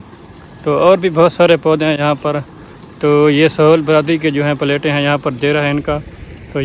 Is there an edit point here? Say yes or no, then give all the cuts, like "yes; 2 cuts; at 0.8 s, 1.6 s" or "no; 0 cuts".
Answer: no; 0 cuts